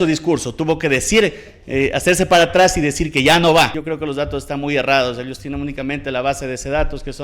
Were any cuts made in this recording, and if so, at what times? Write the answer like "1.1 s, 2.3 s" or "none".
3.8 s